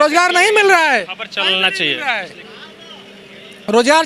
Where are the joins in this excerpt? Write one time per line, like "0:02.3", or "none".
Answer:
none